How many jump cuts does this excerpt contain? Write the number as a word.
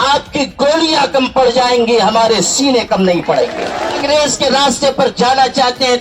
one